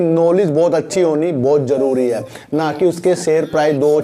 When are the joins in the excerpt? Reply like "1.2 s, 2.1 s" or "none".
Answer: none